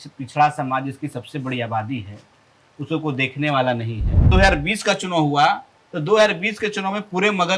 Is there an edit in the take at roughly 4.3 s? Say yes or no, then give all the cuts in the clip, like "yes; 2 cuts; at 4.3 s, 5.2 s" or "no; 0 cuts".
yes; 1 cut; at 4.3 s